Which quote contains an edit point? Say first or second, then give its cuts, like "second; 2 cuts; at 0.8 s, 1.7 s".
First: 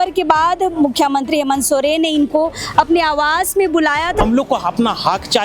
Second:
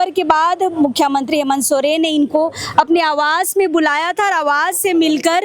first; 1 cut; at 4.2 s